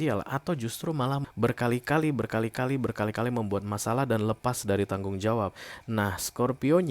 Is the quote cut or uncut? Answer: cut